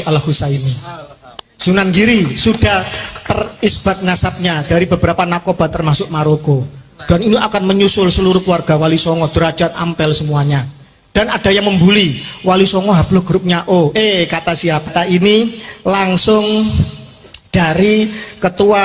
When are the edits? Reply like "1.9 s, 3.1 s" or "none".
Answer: 14.9 s